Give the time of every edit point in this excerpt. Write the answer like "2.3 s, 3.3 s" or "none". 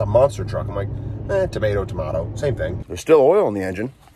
2.8 s